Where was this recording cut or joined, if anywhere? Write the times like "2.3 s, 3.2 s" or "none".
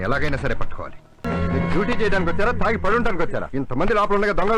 1.2 s

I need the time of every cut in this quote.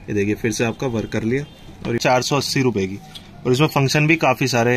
2.0 s

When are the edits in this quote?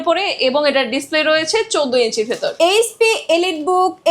2.5 s

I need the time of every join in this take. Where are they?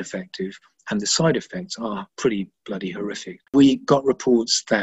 2.1 s, 3.5 s

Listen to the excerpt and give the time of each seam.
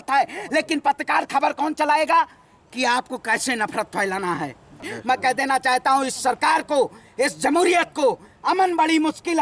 4.9 s

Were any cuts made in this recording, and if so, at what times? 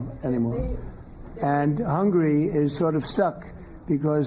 1.4 s

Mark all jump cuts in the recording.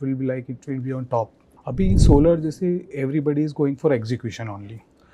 1.5 s

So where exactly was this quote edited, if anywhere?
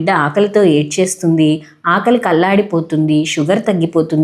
none

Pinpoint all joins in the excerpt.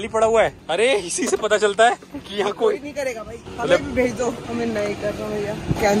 3.4 s, 4.4 s

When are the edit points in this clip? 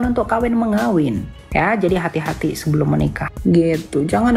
1.3 s, 3.2 s

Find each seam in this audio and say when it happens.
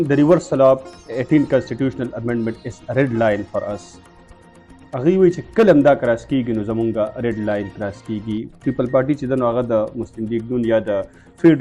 none

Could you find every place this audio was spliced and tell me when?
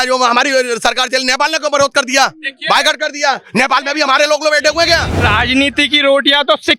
5.2 s

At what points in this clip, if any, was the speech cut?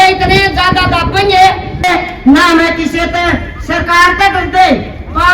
1.9 s

